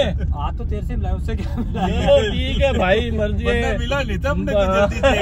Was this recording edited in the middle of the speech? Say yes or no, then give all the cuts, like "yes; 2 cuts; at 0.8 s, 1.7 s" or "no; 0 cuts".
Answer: no; 0 cuts